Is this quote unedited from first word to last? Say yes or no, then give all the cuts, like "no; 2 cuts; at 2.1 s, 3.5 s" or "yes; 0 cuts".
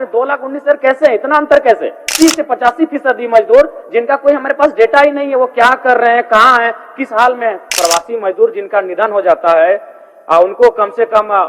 no; 2 cuts; at 2.1 s, 7.7 s